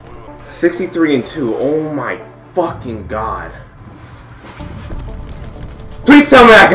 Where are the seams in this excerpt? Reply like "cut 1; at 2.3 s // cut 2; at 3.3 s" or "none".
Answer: cut 1; at 3.7 s